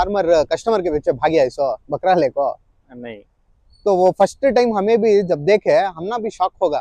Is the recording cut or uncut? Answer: uncut